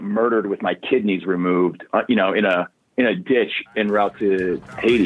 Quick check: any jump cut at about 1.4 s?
no; 1 cut; at 4.2 s

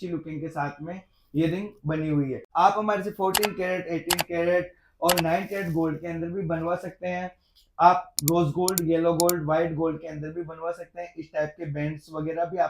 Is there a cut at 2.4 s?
yes; 1 cut; at 2.4 s

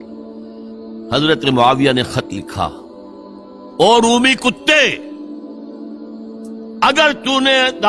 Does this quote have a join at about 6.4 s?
no; 1 cut; at 1.1 s

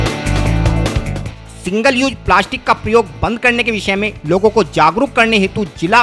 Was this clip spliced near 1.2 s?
yes; 1 cut; at 1.2 s

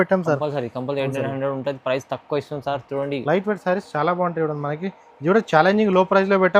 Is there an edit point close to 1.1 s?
no; 1 cut; at 3.2 s

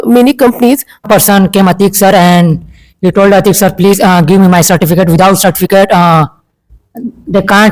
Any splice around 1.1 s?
yes; 1 cut; at 1.1 s

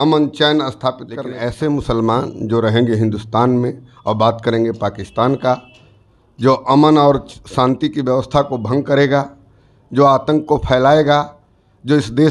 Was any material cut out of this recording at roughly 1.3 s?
yes; 1 cut; at 1.3 s

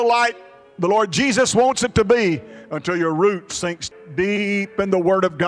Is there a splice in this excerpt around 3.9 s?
yes; 1 cut; at 3.9 s

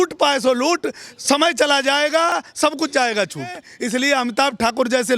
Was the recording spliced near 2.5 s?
yes; 2 cuts; at 2.5 s, 3.7 s

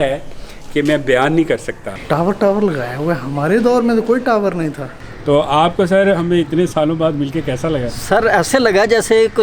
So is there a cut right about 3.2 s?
no; 3 cuts; at 1.9 s, 4.8 s, 7.9 s

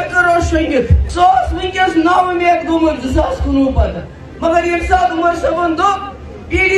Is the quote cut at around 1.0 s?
yes; 1 cut; at 1.0 s

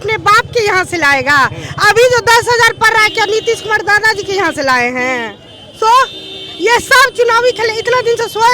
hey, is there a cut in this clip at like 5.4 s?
no; 0 cuts

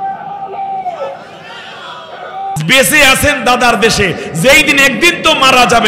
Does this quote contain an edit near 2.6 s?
yes; 1 cut; at 2.6 s

